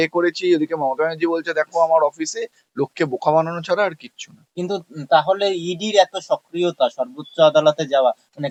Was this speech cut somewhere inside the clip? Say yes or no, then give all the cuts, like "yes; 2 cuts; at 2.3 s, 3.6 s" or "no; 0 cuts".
no; 0 cuts